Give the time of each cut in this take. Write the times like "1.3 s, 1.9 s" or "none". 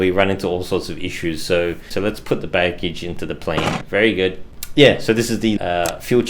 1.9 s, 3.6 s, 4.5 s, 5.6 s